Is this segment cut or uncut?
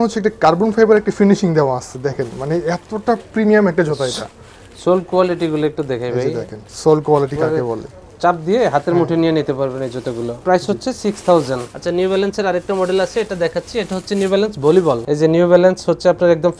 uncut